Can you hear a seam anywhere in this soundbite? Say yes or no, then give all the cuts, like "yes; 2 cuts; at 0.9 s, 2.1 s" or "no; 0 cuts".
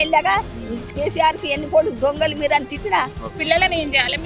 yes; 1 cut; at 3.4 s